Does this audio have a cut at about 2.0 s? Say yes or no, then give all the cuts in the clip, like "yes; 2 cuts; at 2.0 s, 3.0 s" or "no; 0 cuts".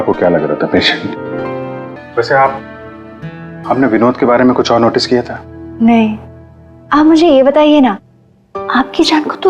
yes; 1 cut; at 2.0 s